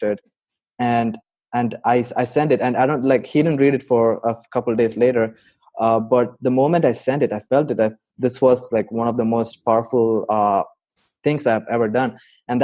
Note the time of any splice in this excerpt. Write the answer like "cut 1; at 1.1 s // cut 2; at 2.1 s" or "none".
none